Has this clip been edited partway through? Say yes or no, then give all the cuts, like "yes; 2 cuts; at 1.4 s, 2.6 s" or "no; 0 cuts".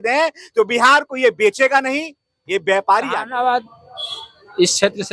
yes; 1 cut; at 3.3 s